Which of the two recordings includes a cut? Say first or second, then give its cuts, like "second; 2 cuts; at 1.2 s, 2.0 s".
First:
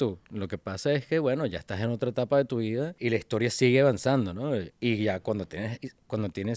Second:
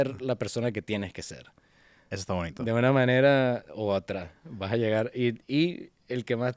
first; 2 cuts; at 2.9 s, 4.7 s